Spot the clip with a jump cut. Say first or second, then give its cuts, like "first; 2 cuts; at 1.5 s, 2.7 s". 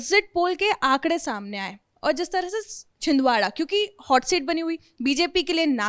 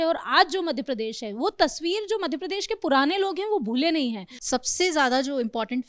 second; 1 cut; at 4.3 s